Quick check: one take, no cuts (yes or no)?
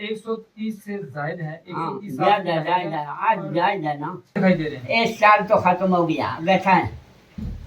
no